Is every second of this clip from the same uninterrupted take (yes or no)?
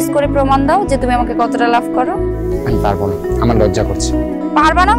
yes